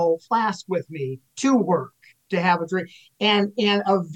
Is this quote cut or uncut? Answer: uncut